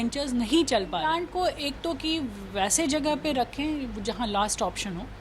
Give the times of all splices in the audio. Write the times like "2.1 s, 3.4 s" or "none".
1.1 s